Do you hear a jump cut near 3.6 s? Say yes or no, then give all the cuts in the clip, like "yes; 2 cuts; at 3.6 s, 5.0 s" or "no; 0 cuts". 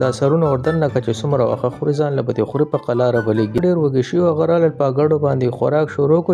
yes; 1 cut; at 3.6 s